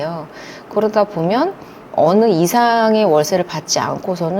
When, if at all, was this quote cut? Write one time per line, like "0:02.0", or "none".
0:01.7

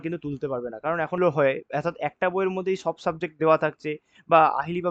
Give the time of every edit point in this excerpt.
0:01.2

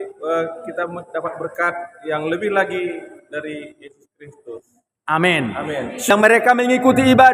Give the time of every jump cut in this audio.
0:06.1

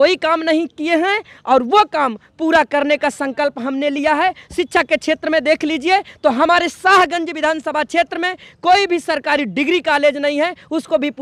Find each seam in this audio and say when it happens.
none

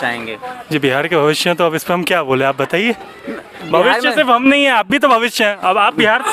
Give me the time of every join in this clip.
none

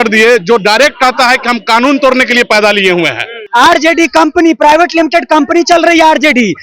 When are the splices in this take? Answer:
0:03.4

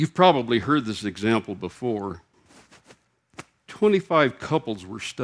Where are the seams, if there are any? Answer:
0:02.4

